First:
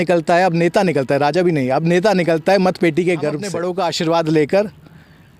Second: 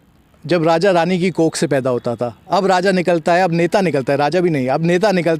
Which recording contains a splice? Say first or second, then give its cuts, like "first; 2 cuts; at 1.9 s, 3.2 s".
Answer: first; 1 cut; at 3.6 s